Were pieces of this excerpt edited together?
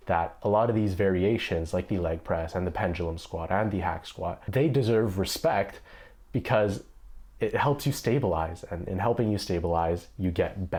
no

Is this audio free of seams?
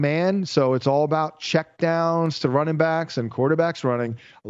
yes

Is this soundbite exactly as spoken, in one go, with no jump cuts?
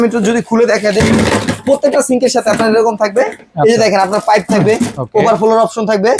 yes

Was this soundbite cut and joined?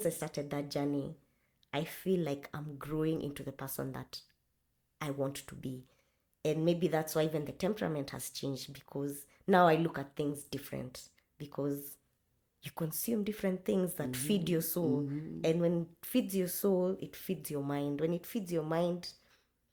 no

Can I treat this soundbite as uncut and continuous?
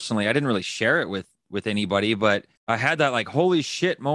no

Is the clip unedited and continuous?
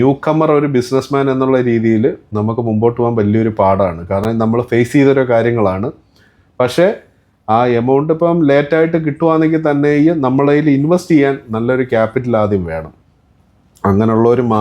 yes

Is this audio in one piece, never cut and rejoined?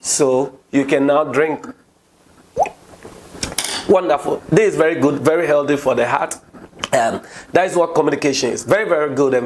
yes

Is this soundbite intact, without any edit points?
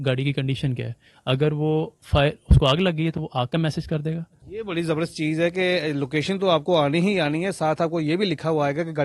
no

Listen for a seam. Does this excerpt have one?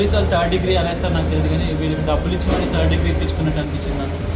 no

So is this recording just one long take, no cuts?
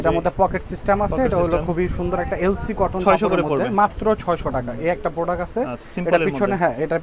yes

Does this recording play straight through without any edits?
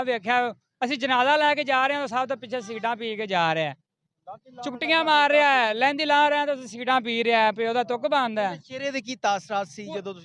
yes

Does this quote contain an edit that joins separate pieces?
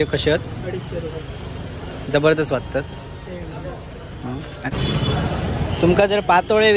yes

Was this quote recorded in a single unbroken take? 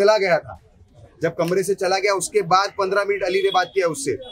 yes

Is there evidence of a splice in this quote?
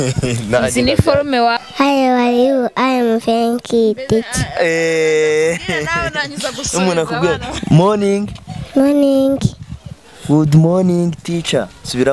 yes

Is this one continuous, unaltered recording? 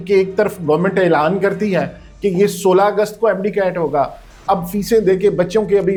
yes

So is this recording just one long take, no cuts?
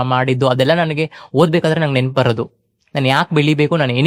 yes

